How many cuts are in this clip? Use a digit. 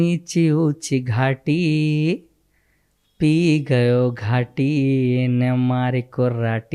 0